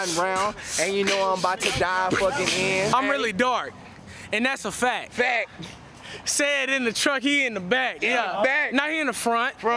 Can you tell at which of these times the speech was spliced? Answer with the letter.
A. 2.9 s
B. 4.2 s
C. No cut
A